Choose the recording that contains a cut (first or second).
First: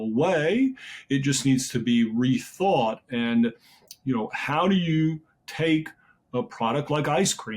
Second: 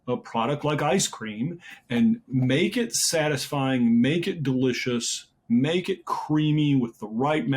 second